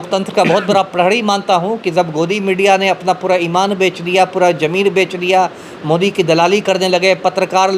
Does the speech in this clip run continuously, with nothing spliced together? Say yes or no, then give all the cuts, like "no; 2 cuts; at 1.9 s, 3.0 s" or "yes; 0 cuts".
yes; 0 cuts